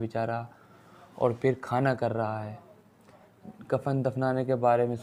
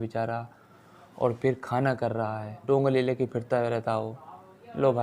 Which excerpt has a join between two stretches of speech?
second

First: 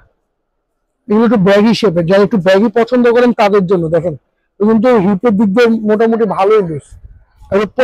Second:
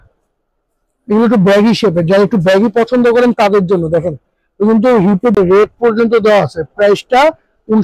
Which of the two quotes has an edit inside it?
second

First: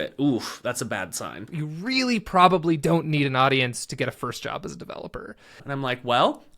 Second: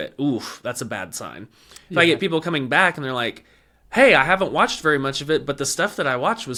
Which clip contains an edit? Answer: first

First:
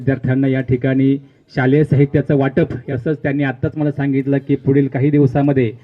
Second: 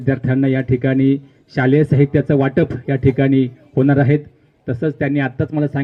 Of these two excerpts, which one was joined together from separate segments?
first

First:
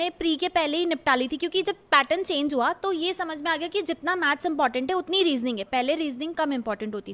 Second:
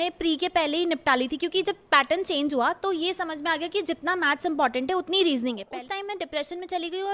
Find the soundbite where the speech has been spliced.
second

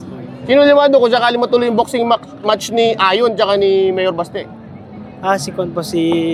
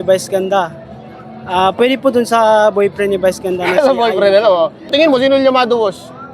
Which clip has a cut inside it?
second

